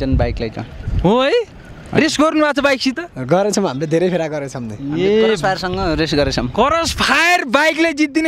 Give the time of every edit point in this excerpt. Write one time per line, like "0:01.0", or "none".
none